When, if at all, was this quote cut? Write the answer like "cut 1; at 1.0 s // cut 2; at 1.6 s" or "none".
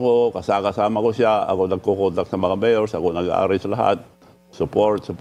none